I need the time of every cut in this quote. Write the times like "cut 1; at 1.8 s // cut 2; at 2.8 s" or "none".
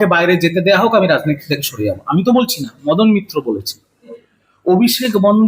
cut 1; at 4.2 s